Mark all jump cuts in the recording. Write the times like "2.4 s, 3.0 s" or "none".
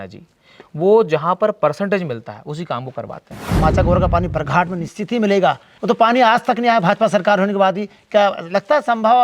3.6 s, 5.7 s